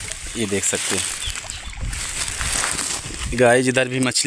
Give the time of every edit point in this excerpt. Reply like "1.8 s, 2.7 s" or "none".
3.2 s